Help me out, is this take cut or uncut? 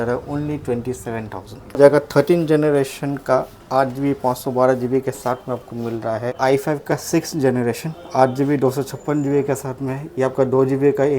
cut